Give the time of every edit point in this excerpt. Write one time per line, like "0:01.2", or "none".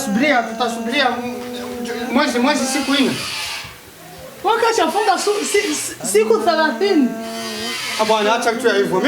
none